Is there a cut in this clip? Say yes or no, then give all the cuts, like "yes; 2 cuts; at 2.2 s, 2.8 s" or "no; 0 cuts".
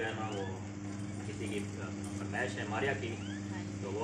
no; 0 cuts